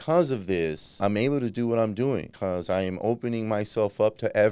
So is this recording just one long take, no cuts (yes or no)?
no